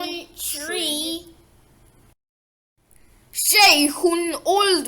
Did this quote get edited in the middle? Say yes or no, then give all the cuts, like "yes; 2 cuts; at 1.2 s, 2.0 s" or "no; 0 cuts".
yes; 1 cut; at 1.1 s